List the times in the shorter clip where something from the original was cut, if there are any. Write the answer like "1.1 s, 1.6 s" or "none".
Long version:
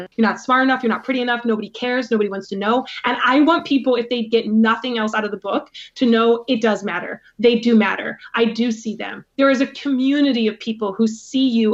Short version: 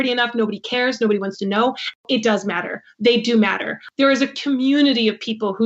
2.0 s, 3.8 s